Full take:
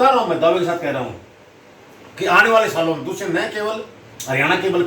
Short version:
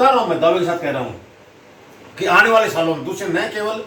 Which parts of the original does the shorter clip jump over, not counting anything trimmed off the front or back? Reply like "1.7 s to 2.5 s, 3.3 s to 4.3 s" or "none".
none

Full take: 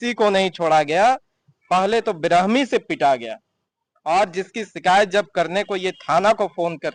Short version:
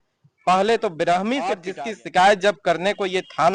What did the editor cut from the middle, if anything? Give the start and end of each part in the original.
2.9 s to 4.4 s

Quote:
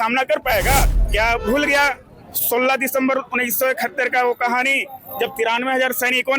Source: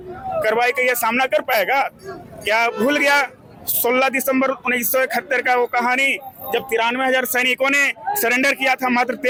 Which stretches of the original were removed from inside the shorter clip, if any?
2.0 s to 2.3 s

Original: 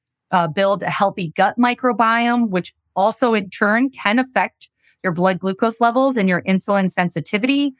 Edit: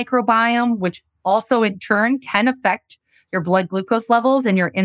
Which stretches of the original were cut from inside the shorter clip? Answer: none

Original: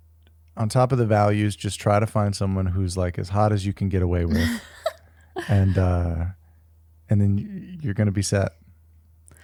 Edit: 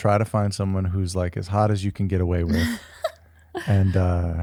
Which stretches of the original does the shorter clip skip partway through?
none

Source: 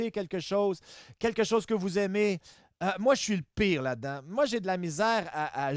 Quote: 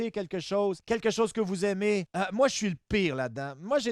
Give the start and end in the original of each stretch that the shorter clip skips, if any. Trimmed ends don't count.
0.8 s to 1.1 s, 2.4 s to 2.8 s

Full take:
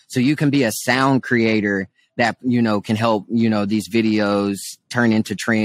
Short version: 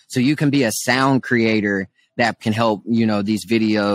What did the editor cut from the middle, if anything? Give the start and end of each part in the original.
2.4 s to 2.8 s

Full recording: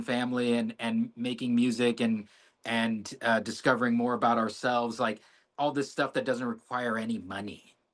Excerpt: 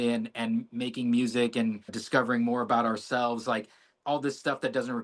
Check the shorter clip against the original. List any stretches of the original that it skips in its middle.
2.4 s to 3.5 s

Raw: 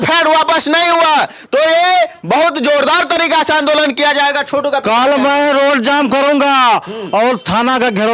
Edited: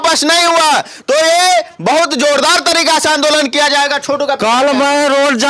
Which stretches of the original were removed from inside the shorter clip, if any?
none

